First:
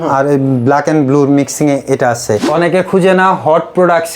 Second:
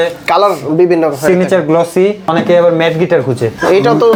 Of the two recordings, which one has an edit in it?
first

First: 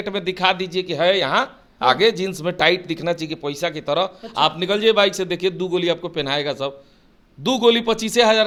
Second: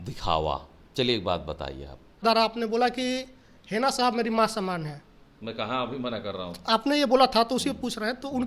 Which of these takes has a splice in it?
second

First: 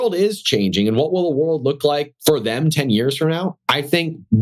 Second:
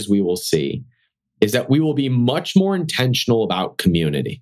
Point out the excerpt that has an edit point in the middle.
first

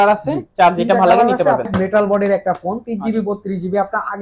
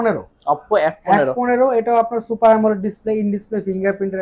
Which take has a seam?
first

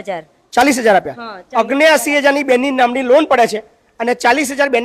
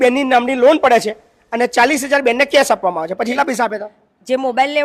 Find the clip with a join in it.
second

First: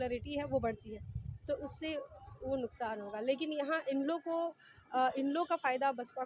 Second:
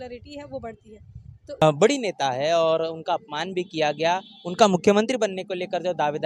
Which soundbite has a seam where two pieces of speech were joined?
second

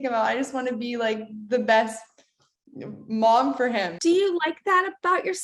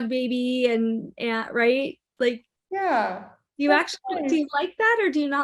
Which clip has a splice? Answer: first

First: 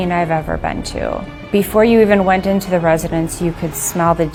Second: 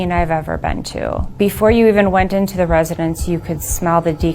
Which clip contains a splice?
second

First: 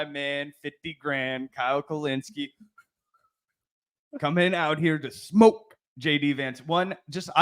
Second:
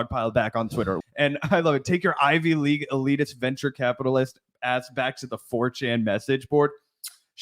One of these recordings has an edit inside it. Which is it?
second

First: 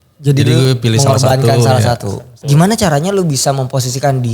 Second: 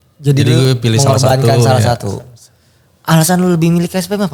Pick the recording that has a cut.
first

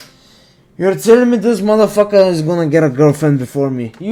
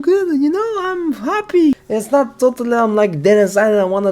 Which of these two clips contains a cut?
second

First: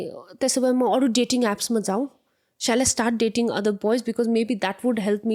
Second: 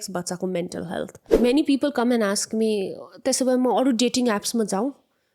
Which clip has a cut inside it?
second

